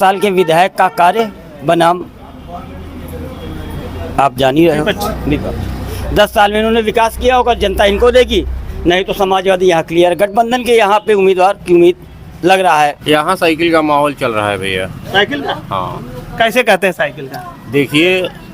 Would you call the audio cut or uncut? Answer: cut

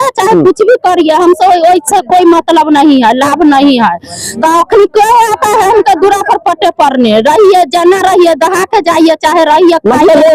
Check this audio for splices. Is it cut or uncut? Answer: uncut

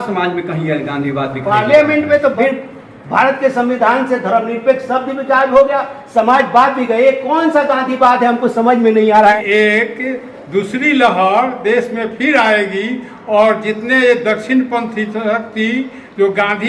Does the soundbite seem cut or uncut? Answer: cut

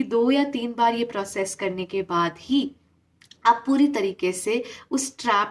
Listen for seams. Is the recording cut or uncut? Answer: uncut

